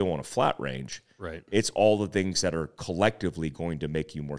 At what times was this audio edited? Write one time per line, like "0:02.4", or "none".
none